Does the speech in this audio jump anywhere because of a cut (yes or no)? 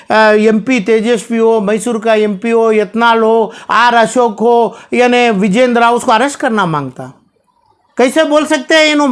no